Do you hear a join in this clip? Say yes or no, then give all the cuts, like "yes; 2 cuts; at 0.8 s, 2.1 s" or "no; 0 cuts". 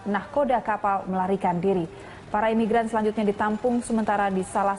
yes; 1 cut; at 3.7 s